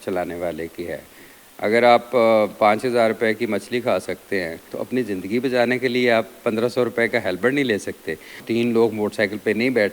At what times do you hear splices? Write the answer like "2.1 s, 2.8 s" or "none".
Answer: 4.7 s, 8.4 s